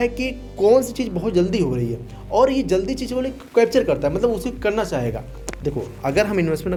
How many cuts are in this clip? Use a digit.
0